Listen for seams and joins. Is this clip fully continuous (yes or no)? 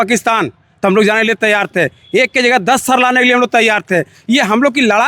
yes